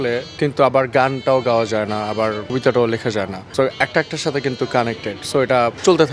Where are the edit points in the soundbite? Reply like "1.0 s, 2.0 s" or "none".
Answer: none